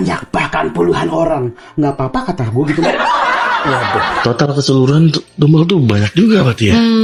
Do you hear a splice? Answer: no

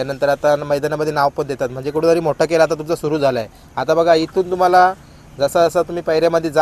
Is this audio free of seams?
yes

